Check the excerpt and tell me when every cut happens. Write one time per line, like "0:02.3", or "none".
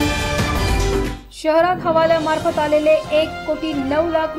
0:01.2